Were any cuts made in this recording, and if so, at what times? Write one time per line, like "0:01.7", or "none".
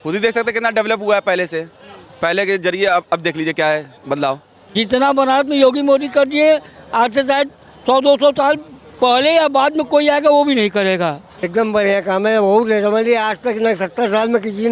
0:04.6
0:11.5